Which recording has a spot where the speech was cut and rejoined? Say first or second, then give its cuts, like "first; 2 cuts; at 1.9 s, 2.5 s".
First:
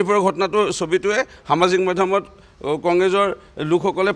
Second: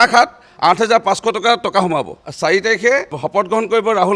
second; 2 cuts; at 2.2 s, 3.2 s